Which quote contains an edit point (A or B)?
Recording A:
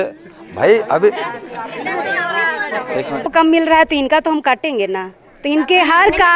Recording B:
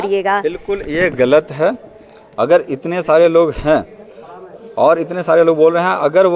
A